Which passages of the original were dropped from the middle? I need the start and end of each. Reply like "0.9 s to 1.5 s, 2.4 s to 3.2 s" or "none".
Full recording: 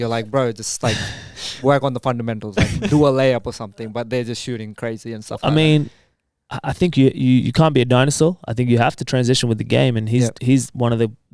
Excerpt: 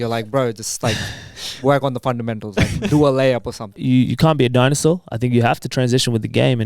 3.8 s to 7.2 s